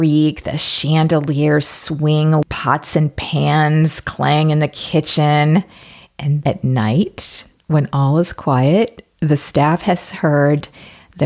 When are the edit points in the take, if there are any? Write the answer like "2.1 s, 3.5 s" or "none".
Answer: 2.5 s, 6.4 s